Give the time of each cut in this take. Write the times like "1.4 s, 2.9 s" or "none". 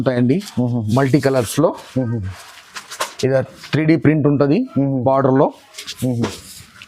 none